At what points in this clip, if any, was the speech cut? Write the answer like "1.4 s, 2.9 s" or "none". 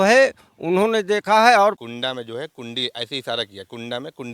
1.8 s